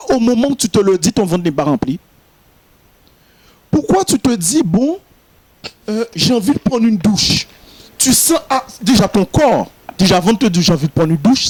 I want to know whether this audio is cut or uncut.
uncut